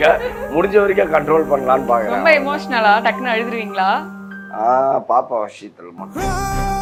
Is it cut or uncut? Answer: uncut